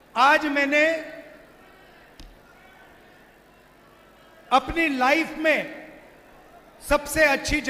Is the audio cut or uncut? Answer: uncut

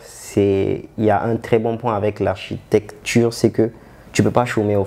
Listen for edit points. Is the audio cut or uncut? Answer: uncut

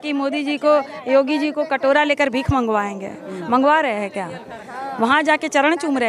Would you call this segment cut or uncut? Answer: uncut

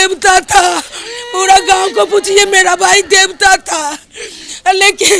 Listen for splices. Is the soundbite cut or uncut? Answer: uncut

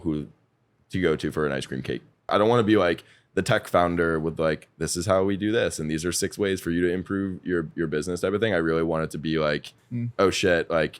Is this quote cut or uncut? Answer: cut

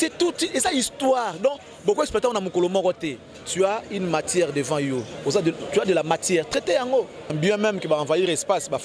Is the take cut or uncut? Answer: cut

